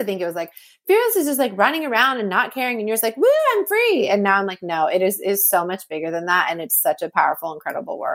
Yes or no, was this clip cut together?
no